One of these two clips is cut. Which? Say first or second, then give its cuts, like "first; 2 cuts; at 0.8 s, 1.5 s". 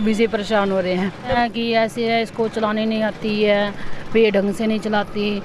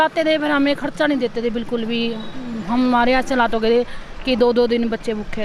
first; 1 cut; at 1.4 s